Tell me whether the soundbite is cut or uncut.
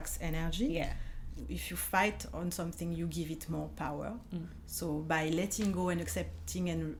uncut